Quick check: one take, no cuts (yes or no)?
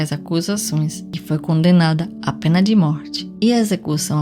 no